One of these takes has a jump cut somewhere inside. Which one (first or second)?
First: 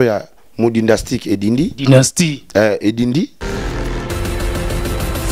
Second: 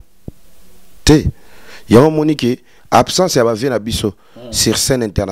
first